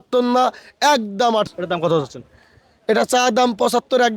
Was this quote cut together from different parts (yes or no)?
yes